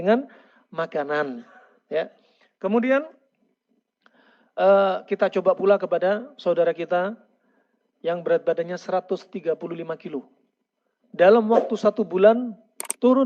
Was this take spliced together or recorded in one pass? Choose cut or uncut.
uncut